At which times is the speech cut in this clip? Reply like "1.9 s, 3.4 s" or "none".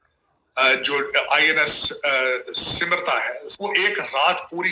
3.5 s